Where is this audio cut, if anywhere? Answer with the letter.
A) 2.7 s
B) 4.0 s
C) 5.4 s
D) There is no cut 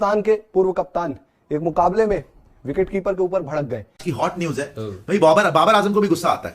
B